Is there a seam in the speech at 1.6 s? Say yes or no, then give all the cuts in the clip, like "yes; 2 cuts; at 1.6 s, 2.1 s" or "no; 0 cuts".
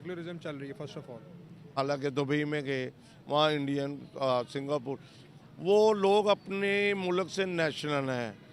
yes; 1 cut; at 1.6 s